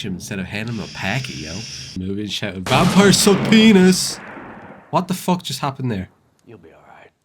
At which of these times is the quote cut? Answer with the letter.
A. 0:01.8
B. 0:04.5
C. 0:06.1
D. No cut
A